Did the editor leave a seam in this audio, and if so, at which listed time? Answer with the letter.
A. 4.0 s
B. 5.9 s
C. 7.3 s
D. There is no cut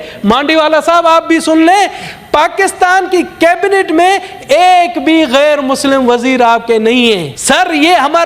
C